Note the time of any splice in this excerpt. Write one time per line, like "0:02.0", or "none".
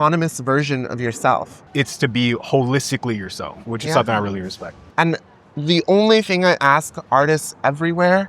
0:01.6
0:04.8